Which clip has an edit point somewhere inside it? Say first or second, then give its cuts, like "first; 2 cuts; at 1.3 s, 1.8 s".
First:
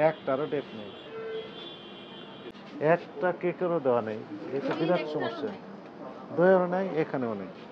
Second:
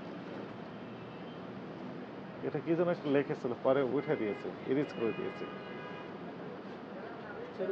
first; 1 cut; at 2.5 s